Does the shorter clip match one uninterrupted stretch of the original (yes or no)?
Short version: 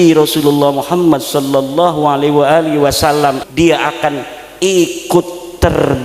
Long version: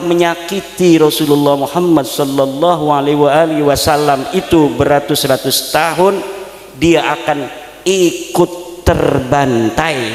no